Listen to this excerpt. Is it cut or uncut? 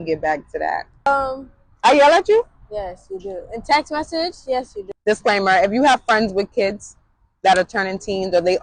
cut